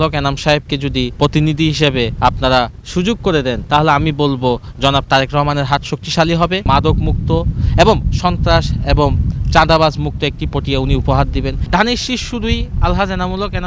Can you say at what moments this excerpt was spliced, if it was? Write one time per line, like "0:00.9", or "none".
0:01.1
0:02.1
0:03.6
0:06.6
0:11.6